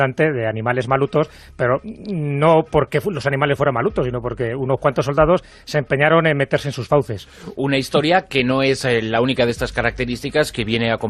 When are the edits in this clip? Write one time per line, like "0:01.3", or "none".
0:09.6